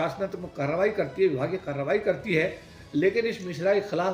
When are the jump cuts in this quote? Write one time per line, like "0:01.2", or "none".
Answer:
none